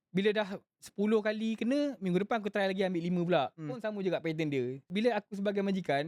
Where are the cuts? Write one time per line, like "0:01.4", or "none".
0:04.9